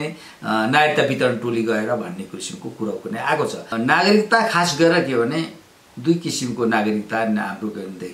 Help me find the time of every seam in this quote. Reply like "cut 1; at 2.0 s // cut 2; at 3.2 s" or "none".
cut 1; at 3.7 s